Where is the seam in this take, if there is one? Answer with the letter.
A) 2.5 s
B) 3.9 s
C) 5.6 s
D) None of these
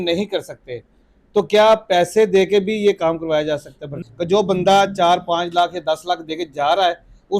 B